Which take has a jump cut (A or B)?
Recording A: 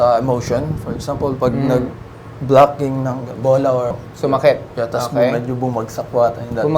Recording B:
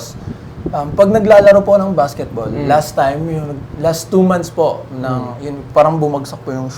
A